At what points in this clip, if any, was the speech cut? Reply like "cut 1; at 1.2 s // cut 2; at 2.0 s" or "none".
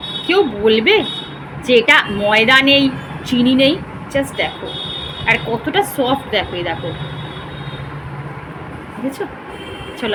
none